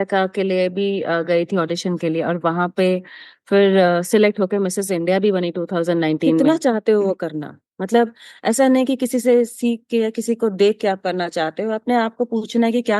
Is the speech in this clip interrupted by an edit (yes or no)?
yes